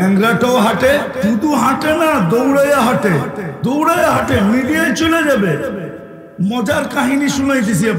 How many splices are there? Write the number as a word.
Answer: two